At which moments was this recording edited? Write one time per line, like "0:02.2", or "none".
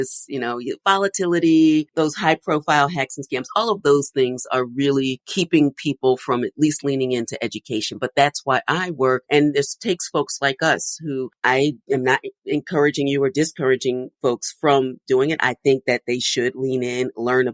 0:01.9
0:05.2
0:11.8